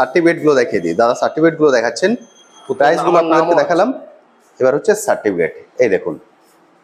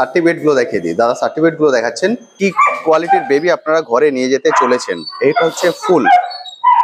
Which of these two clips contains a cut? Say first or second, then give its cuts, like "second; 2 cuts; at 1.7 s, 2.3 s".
second; 1 cut; at 2.3 s